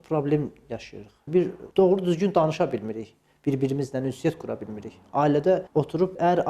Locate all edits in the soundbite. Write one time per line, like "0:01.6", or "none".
none